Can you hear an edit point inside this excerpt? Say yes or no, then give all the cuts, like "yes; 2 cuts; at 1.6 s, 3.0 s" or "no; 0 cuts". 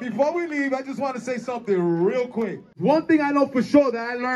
yes; 1 cut; at 2.8 s